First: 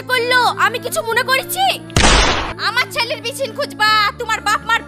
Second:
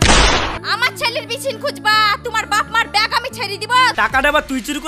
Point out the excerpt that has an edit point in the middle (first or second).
second